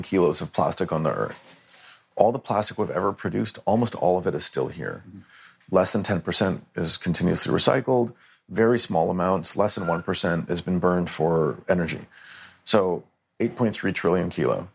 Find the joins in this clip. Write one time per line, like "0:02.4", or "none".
none